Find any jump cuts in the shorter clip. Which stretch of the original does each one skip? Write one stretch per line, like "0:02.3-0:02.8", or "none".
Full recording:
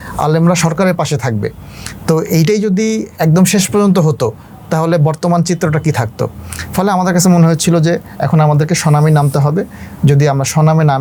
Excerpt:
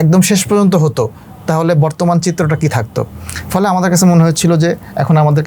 none